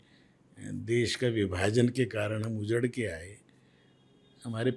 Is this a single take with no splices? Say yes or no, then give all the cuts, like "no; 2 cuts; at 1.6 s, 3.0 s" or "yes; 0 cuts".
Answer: yes; 0 cuts